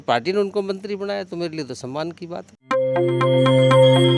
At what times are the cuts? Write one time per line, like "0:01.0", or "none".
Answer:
0:02.5

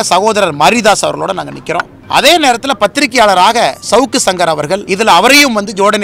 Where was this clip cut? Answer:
0:01.9
0:04.9

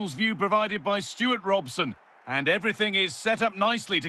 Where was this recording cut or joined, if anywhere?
none

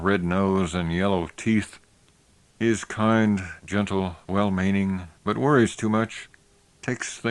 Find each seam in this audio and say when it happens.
0:02.6

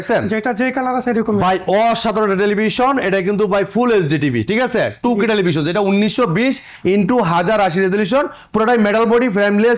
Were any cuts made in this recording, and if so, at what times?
none

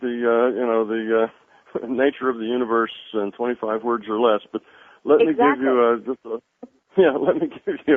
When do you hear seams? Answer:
0:04.3

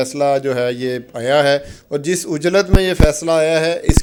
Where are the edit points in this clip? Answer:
none

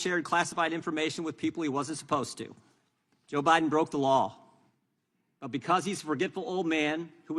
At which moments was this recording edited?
none

